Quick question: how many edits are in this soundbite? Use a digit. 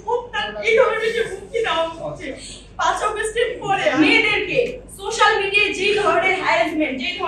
1